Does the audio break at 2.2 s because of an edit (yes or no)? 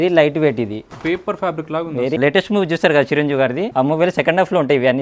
yes